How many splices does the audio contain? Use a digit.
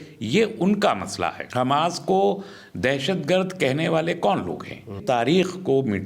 2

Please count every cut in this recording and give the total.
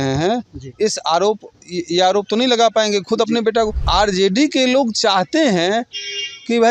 1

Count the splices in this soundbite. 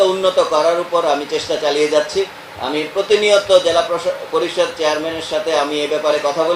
0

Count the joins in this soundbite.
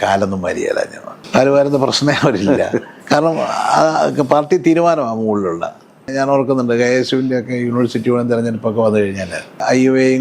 0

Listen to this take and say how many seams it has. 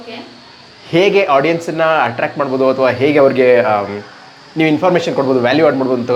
0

